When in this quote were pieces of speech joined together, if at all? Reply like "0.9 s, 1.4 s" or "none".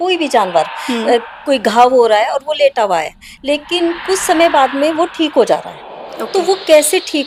none